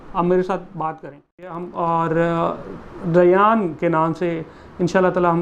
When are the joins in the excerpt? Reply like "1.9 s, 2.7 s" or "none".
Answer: 1.5 s